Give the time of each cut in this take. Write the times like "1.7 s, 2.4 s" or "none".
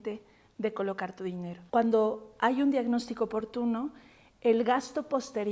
1.5 s

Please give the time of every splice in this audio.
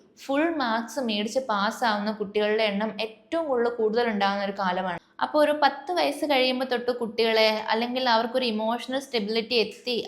5.0 s

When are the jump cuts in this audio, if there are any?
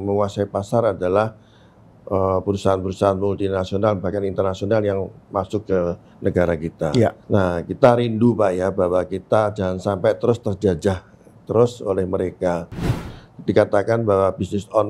7.2 s, 12.9 s

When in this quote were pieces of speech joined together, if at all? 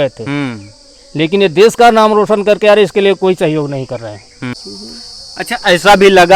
4.5 s

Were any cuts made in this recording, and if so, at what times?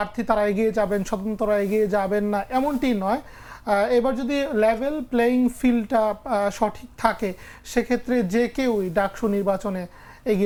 none

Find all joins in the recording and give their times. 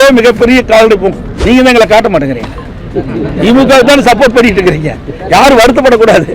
1.3 s

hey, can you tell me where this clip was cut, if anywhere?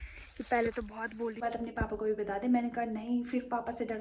1.4 s

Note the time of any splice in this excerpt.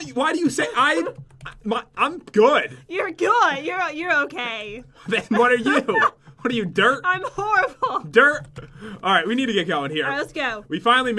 none

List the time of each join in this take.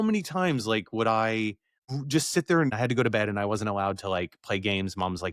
1.7 s, 2.7 s

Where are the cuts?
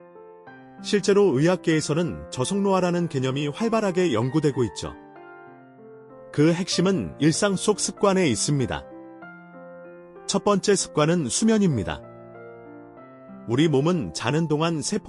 0.9 s

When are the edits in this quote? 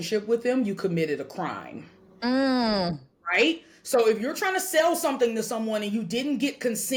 none

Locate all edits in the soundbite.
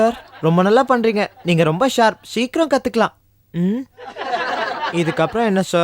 none

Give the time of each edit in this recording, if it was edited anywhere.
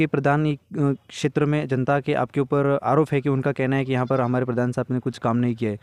none

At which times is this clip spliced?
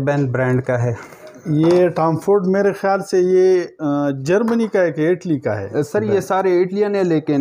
none

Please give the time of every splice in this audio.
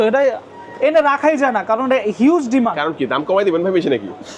none

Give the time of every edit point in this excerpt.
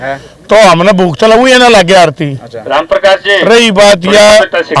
none

